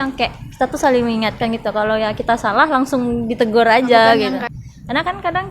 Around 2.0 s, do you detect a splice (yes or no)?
no